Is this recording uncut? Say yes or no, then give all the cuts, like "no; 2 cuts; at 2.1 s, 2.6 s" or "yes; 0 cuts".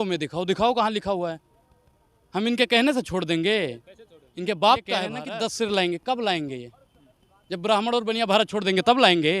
no; 1 cut; at 5.2 s